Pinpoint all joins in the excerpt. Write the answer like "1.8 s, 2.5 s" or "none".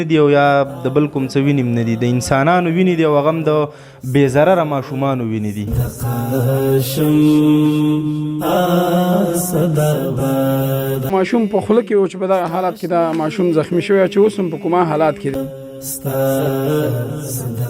11.1 s, 15.3 s